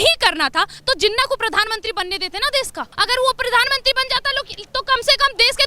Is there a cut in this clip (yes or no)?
yes